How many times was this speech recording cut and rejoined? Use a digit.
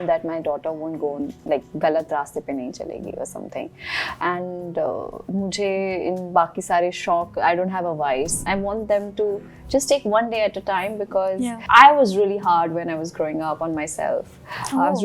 1